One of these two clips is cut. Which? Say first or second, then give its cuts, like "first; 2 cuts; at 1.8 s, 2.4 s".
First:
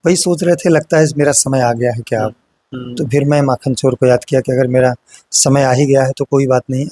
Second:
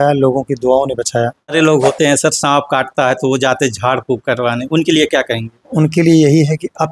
second; 1 cut; at 1.5 s